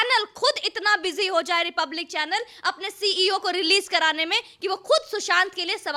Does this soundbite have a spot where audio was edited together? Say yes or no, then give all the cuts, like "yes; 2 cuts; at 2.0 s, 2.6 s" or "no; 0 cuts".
no; 0 cuts